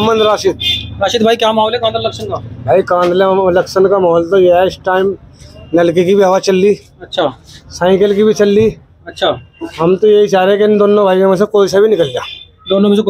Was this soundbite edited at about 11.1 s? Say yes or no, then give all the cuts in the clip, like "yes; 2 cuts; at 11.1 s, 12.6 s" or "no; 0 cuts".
no; 0 cuts